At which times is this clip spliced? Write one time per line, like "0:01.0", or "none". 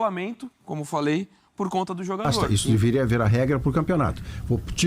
0:02.5